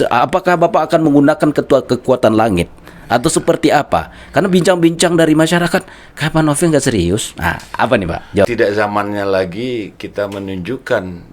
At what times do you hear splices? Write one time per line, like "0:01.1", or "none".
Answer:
0:08.5